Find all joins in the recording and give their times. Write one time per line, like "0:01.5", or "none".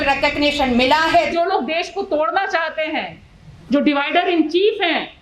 0:01.3